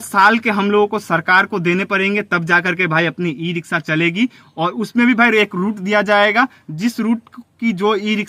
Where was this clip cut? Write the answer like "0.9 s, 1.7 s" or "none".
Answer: none